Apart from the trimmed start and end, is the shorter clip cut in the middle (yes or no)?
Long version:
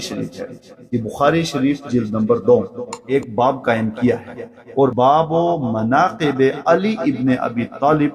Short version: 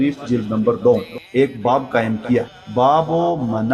yes